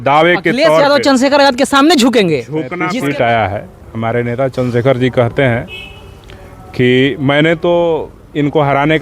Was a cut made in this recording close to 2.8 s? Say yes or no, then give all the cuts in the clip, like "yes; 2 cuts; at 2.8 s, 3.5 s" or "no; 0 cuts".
yes; 1 cut; at 2.8 s